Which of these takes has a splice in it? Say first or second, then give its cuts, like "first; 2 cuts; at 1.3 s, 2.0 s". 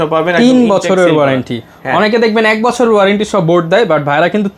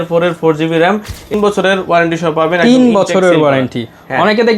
second; 1 cut; at 1.3 s